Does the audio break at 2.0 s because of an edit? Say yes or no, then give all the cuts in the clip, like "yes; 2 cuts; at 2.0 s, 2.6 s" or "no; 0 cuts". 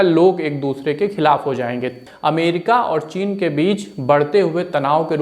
yes; 1 cut; at 2.0 s